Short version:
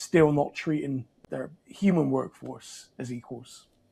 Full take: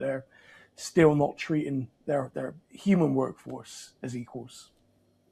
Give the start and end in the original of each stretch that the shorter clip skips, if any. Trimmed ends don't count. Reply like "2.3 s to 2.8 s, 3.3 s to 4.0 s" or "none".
2.0 s to 2.3 s